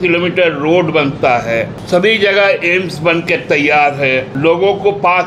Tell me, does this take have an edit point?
yes; 2 cuts; at 1.8 s, 4.3 s

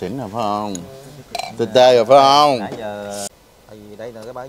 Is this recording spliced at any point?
yes; 1 cut; at 3.4 s

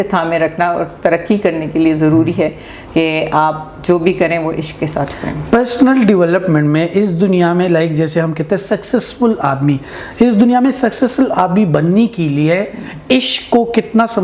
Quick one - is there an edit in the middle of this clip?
no; 0 cuts

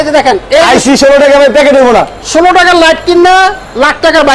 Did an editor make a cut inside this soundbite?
no; 0 cuts

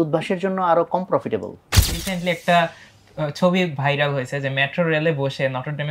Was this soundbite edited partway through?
yes; 1 cut; at 2.1 s

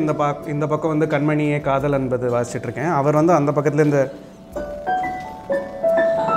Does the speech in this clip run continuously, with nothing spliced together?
yes; 0 cuts

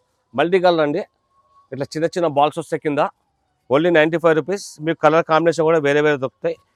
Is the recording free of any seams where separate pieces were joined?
yes; 0 cuts

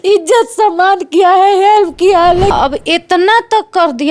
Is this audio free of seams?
no; 1 cut; at 2.5 s

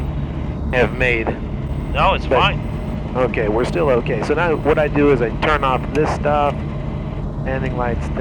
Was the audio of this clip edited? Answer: no; 0 cuts

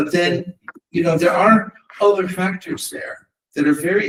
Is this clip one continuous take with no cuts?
yes; 0 cuts

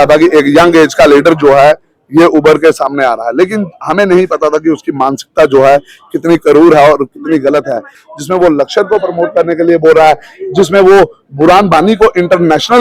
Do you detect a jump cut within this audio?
yes; 1 cut; at 8.0 s

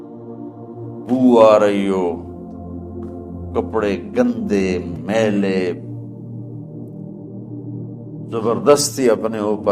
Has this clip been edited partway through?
yes; 5 cuts; at 1.0 s, 2.2 s, 3.5 s, 5.9 s, 7.9 s

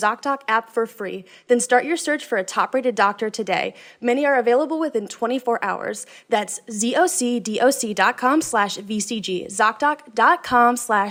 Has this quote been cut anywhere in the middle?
no; 0 cuts

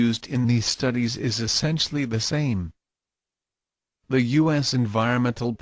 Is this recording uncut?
yes; 0 cuts

